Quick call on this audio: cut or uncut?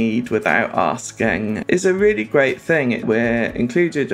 cut